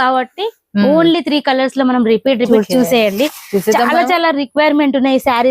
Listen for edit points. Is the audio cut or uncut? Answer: cut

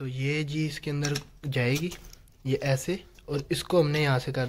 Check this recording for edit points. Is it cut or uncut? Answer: uncut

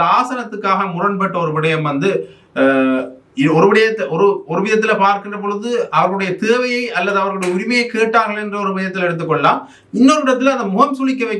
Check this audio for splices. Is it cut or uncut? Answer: uncut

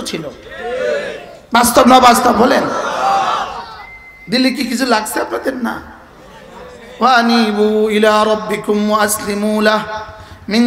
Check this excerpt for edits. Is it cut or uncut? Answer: uncut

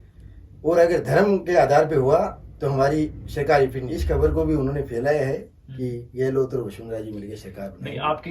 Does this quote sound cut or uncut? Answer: cut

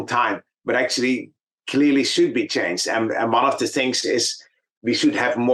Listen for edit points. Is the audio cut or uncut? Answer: uncut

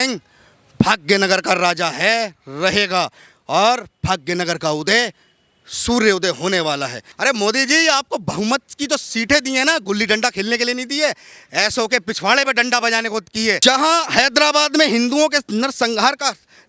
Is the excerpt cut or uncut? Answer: cut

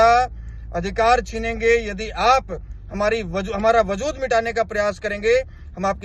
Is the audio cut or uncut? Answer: uncut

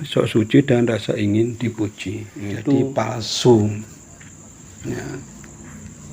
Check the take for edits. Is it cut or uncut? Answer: cut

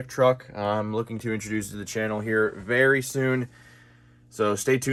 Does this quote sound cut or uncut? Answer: uncut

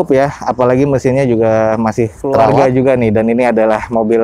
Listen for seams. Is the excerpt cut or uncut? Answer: cut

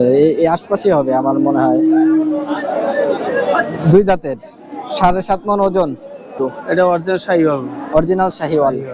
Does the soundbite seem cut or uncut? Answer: cut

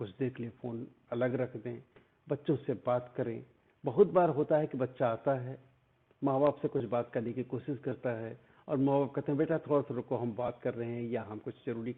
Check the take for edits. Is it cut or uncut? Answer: uncut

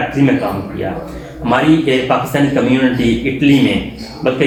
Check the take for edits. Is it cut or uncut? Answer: uncut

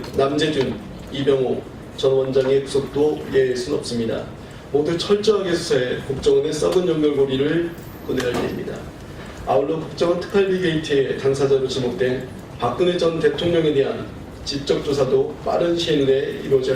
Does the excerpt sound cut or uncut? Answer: cut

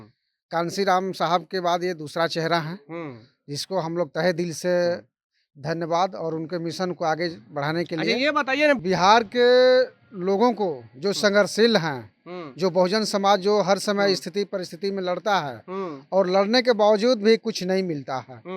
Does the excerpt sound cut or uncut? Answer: cut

